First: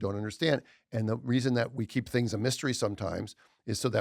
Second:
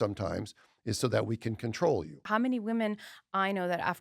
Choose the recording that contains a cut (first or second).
second